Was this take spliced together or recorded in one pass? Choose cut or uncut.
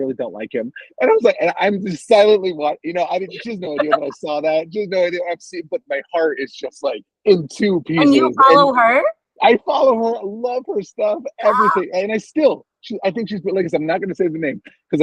cut